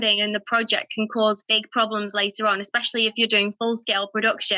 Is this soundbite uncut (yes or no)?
no